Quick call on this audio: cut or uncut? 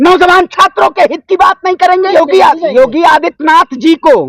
cut